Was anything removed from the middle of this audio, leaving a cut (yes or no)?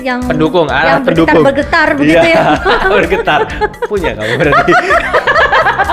no